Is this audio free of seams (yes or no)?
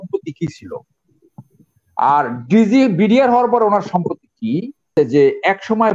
no